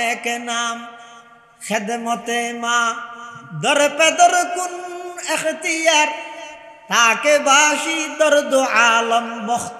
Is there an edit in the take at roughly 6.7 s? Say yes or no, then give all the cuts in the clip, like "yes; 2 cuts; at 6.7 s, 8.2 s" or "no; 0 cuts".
no; 0 cuts